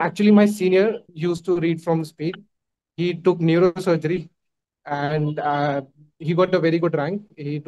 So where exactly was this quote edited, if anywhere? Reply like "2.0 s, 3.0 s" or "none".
1.1 s